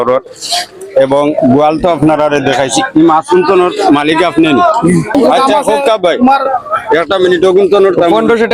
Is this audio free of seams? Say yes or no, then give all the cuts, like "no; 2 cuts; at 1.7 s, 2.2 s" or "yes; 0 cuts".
no; 1 cut; at 5.1 s